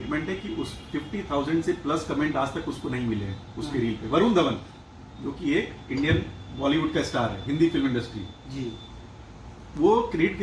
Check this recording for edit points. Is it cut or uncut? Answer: uncut